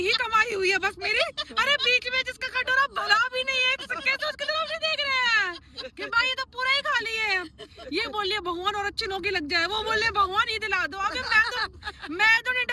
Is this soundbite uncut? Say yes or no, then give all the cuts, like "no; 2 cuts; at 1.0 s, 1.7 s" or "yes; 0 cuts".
yes; 0 cuts